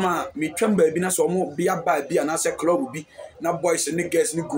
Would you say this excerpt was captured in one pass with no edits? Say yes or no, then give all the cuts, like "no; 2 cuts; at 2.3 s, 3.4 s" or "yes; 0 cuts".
yes; 0 cuts